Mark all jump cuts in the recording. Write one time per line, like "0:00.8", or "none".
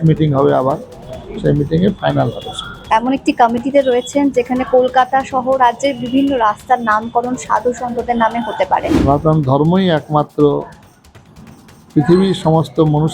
0:02.8
0:08.9